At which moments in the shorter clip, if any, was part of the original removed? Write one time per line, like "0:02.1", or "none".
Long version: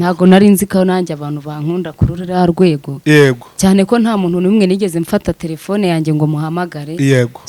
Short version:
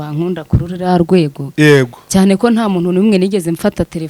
none